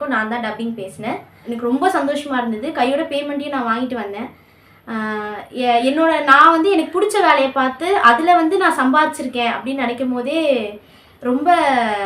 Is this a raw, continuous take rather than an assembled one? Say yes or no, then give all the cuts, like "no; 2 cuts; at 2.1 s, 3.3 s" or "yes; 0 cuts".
no; 1 cut; at 1.3 s